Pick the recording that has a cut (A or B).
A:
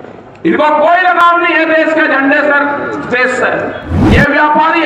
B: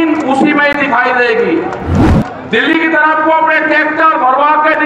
A